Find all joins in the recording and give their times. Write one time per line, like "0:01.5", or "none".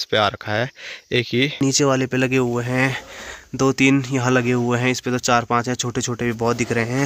0:01.6